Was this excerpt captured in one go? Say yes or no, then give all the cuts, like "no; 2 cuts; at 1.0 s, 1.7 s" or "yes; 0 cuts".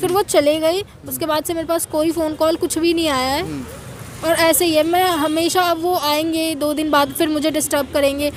yes; 0 cuts